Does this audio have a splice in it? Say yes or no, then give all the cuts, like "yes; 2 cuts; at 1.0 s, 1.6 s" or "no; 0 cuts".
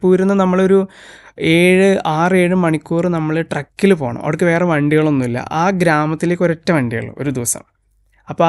no; 0 cuts